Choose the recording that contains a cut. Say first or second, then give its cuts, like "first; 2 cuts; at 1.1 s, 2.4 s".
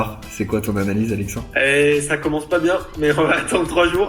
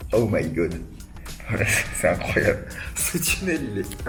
first; 1 cut; at 1.4 s